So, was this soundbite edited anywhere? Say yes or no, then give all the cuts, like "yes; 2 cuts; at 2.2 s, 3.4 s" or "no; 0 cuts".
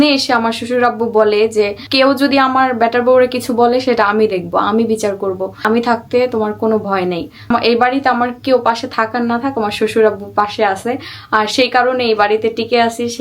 yes; 3 cuts; at 1.8 s, 5.5 s, 7.5 s